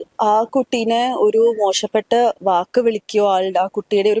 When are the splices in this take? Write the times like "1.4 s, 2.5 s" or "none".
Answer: none

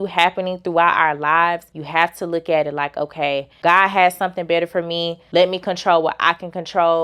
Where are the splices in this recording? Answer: 1.7 s, 3.5 s, 5.2 s

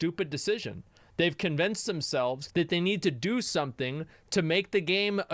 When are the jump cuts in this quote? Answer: 2.4 s

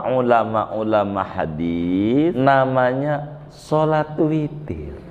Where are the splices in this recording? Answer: 2.3 s

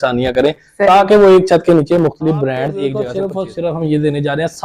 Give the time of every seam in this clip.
2.9 s

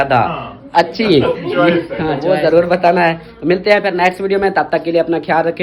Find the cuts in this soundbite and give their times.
2.2 s

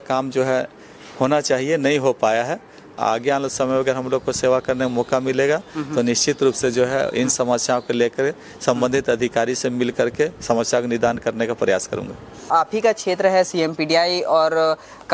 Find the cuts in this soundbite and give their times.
2.8 s, 12.5 s

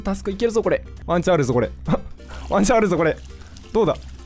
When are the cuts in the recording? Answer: 0.9 s

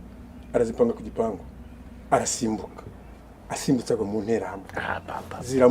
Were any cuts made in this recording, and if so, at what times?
none

